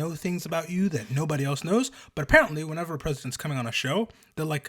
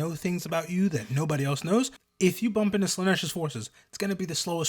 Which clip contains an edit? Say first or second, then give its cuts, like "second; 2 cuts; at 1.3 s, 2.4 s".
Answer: second; 1 cut; at 2.0 s